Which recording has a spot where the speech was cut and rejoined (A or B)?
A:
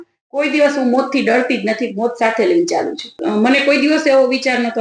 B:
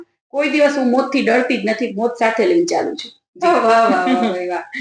A